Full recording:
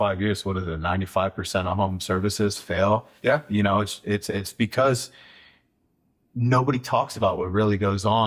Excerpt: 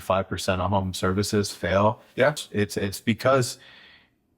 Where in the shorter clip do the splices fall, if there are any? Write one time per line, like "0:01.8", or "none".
0:02.4